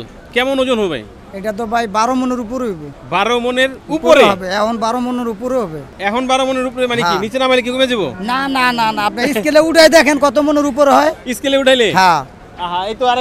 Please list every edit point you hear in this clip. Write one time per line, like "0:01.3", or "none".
none